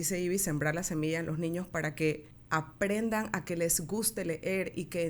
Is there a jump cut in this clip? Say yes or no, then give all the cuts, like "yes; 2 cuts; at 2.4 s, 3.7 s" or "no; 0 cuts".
yes; 1 cut; at 2.3 s